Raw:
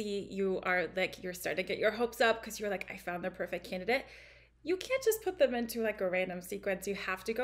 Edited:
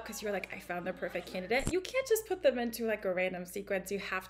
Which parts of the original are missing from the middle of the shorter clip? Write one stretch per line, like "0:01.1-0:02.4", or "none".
0:04.0-0:04.6